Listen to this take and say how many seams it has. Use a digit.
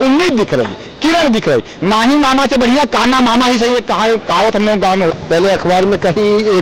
1